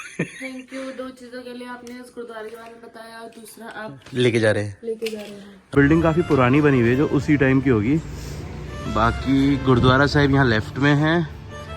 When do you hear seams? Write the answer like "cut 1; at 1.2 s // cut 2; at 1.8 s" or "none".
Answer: cut 1; at 5.7 s